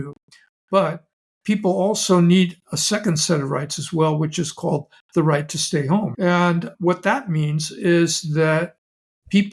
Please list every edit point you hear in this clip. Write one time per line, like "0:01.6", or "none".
0:06.1